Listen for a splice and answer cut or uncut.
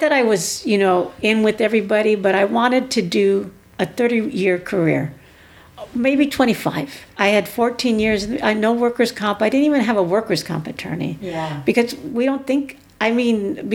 cut